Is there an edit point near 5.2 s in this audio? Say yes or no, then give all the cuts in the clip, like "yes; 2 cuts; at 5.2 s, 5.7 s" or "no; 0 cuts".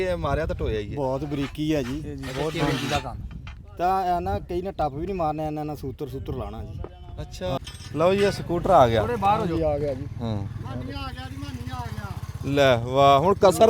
no; 1 cut; at 7.6 s